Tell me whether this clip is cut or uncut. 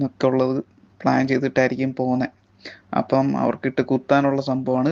uncut